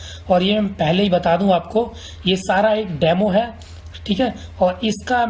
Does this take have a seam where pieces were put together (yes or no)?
no